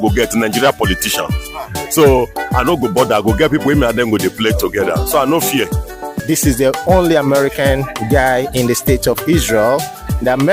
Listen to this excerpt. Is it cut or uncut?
cut